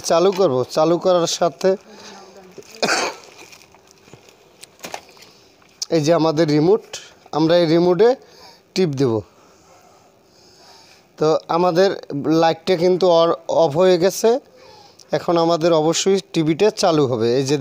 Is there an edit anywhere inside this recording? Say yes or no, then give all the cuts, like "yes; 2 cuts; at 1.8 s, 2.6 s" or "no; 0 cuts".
no; 0 cuts